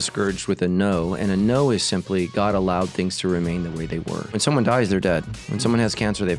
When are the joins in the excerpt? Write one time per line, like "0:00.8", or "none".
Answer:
0:04.3